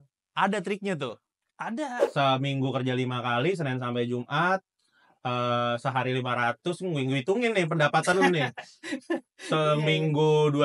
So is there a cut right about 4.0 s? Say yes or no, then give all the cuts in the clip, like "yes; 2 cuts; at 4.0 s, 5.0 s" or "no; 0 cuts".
no; 1 cut; at 2.0 s